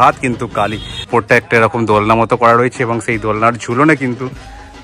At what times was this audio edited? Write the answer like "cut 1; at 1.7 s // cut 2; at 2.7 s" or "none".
cut 1; at 0.9 s